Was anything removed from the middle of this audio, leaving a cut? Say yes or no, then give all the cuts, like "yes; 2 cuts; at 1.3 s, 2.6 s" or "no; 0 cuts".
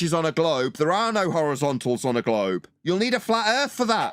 yes; 1 cut; at 2.7 s